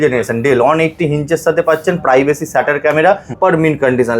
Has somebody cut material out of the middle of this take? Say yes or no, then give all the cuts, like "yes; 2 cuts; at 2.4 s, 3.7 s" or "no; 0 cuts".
yes; 1 cut; at 3.3 s